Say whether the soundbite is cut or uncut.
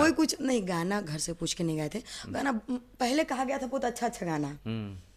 uncut